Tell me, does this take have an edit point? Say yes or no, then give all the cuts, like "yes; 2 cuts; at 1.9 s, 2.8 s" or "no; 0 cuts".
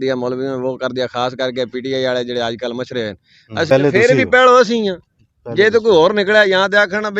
yes; 1 cut; at 3.7 s